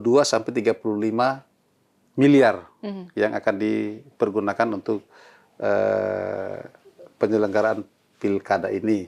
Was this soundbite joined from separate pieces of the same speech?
no; 0 cuts

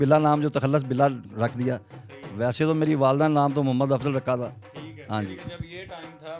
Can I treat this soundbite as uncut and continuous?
yes; 0 cuts

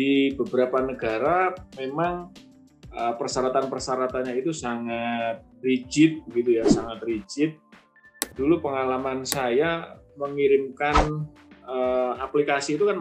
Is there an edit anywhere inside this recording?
no; 0 cuts

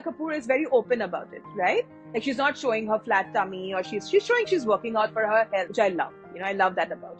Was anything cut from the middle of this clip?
no; 0 cuts

